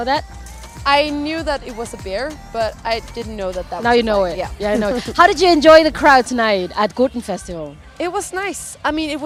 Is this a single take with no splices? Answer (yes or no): yes